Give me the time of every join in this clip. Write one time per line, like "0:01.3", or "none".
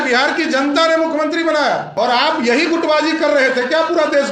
0:01.9